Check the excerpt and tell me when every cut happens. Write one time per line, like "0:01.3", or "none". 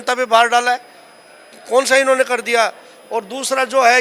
none